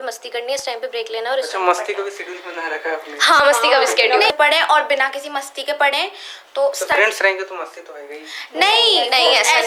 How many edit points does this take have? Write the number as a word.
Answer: one